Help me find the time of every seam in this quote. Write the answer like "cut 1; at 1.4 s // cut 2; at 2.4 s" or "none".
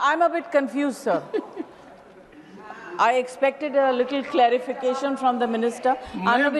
none

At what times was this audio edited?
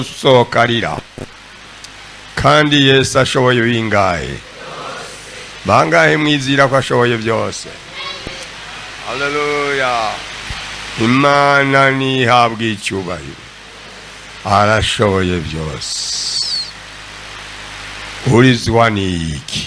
none

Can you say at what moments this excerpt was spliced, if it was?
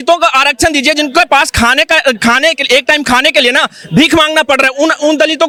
none

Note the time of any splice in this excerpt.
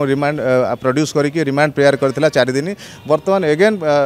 cut 1; at 2.9 s

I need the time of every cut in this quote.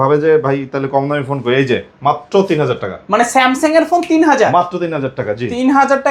none

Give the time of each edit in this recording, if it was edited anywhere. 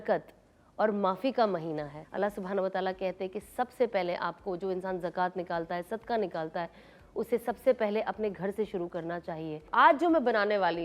cut 1; at 2.0 s // cut 2; at 9.6 s

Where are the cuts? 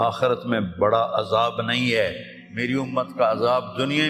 none

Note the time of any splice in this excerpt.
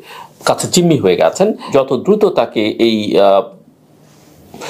cut 1; at 1.6 s

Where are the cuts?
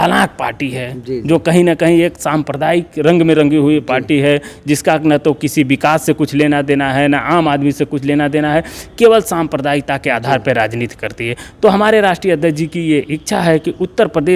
none

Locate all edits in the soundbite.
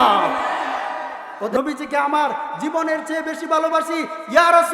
cut 1; at 1.5 s

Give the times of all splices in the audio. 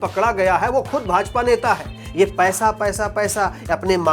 cut 1; at 1.9 s

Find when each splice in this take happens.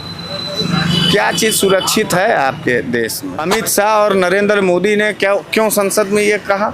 cut 1; at 3.3 s

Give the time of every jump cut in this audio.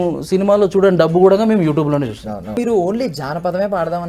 cut 1; at 2.6 s

